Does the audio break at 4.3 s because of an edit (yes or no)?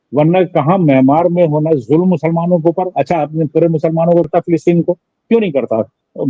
yes